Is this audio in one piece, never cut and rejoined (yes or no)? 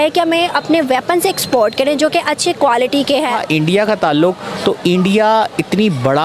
yes